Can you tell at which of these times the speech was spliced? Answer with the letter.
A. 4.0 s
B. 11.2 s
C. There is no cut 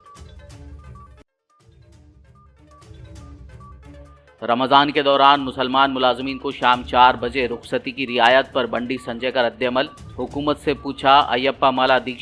A